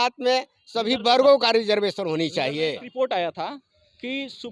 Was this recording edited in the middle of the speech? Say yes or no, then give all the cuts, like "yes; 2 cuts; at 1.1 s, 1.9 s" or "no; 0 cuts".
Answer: yes; 1 cut; at 2.8 s